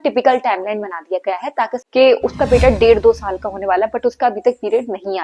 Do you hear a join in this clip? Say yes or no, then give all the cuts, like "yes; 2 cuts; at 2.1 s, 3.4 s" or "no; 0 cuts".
yes; 1 cut; at 1.8 s